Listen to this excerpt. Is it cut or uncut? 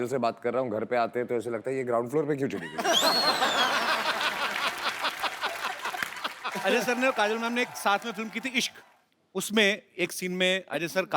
cut